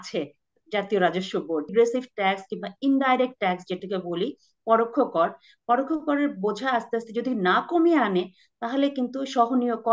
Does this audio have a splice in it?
yes; 1 cut; at 1.7 s

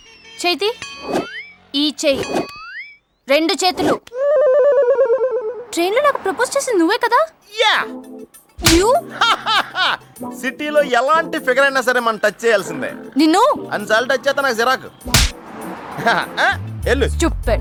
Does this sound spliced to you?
no; 0 cuts

